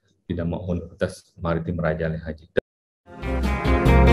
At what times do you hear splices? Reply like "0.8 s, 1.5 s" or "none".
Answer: 2.6 s